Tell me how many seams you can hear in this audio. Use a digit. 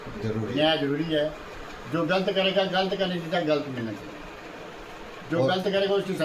0